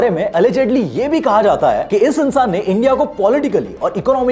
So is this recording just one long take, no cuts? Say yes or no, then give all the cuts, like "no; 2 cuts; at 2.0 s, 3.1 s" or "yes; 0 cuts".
yes; 0 cuts